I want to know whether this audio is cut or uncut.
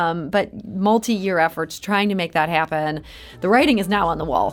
uncut